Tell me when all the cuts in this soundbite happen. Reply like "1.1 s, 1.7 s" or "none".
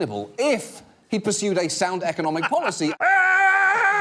3.0 s